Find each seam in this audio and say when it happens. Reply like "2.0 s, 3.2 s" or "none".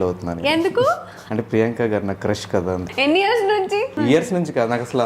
1.1 s, 2.9 s, 4.0 s